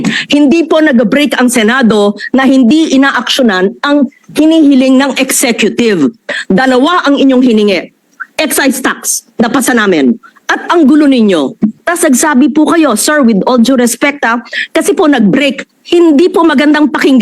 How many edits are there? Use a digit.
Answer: 2